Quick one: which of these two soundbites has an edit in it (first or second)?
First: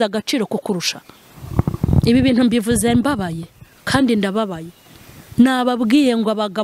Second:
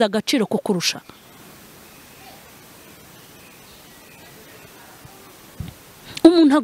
first